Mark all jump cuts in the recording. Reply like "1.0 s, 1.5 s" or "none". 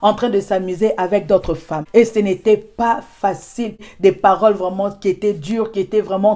1.8 s, 3.5 s